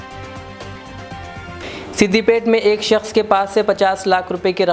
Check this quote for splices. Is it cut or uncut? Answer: uncut